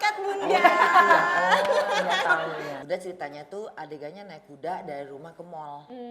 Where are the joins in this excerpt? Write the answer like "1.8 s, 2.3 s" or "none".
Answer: 2.7 s

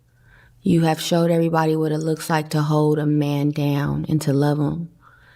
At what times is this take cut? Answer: 3.6 s

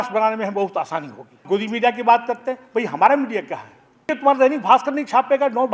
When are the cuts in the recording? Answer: 1.4 s, 4.1 s

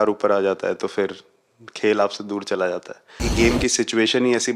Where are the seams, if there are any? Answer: 3.3 s

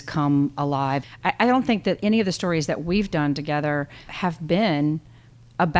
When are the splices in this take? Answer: 1.0 s, 4.1 s

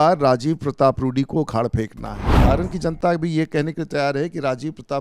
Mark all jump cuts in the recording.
2.4 s

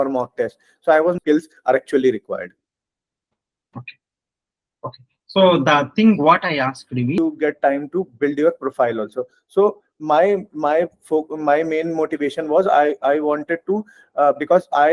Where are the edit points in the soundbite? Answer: 1.2 s, 7.2 s

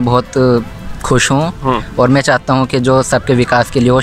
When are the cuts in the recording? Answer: none

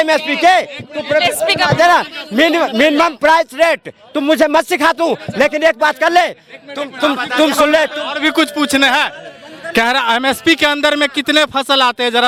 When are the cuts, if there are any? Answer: none

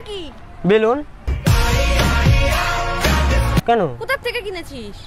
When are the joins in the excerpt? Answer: 3.6 s

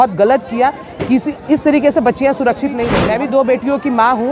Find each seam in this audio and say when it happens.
2.9 s

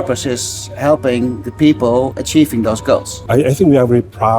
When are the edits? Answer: 3.1 s

